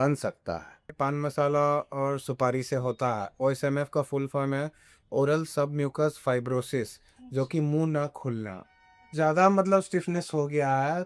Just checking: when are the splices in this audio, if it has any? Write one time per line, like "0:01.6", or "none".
0:00.9
0:09.1